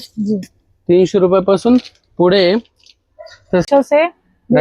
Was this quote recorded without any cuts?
no; 1 cut; at 3.7 s

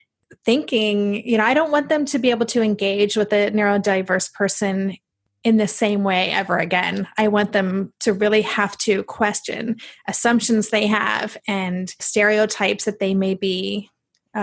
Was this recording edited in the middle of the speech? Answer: no; 0 cuts

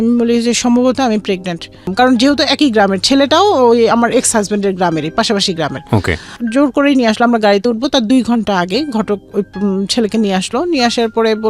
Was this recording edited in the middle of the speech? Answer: yes; 1 cut; at 1.9 s

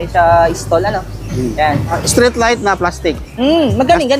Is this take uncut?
no; 1 cut; at 2.0 s

